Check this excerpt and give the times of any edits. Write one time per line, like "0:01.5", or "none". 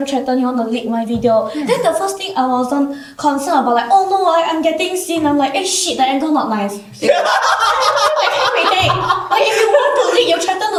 none